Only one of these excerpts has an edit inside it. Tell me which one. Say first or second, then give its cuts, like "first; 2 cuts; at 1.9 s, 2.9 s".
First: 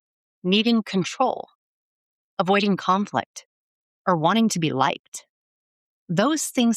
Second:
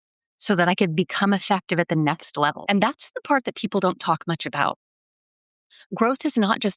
second; 1 cut; at 2.6 s